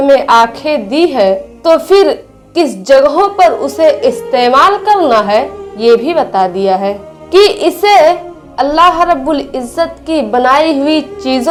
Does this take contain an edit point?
no; 0 cuts

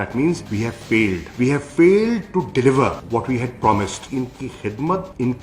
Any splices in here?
yes; 1 cut; at 4.0 s

